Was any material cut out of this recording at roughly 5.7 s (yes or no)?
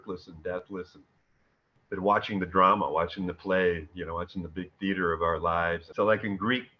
yes